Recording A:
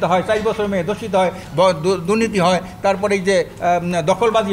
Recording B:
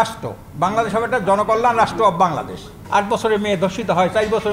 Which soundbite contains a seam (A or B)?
B